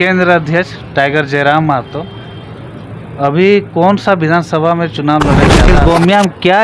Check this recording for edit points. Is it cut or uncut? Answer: cut